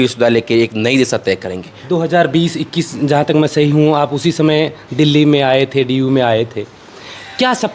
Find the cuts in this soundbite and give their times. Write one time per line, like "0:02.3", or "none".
none